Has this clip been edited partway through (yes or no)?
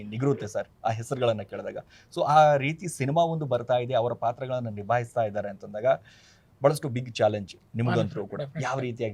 no